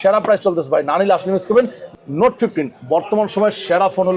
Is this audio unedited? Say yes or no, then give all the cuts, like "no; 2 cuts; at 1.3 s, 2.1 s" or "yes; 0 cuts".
no; 1 cut; at 1.8 s